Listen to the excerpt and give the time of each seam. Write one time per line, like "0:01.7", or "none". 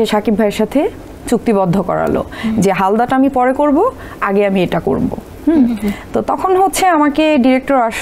none

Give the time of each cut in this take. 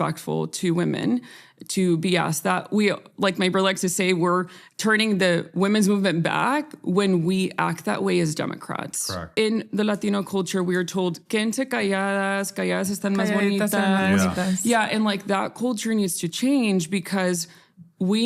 0:09.2

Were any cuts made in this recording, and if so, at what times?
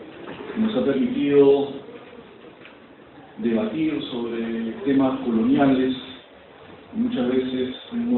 0:02.7

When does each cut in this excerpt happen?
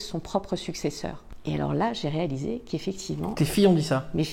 0:01.3

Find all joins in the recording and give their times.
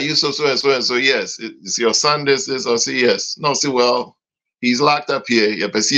none

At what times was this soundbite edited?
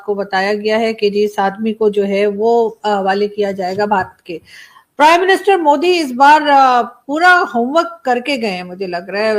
none

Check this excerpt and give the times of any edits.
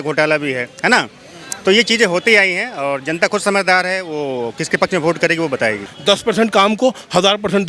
0:05.9

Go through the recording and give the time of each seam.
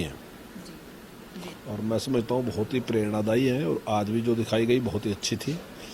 0:01.2

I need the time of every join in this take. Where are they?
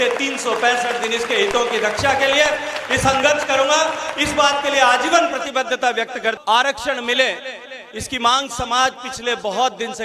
0:06.4

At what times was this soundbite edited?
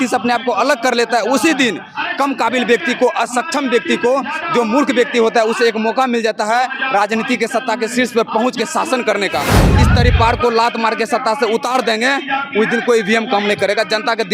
0:09.6

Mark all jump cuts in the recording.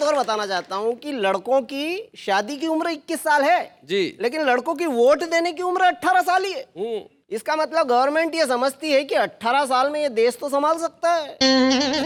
none

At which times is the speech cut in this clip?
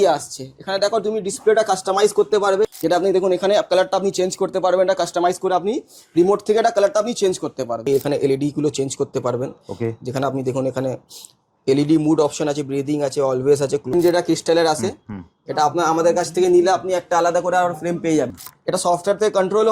0:02.7
0:07.9
0:13.9
0:18.4

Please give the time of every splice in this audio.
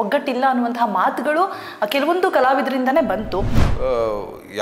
0:03.6

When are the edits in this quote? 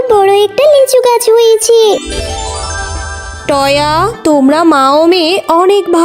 0:02.2

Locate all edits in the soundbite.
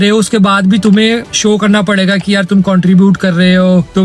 none

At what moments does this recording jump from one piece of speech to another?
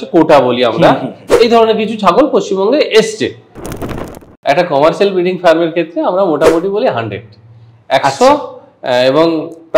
0:03.8

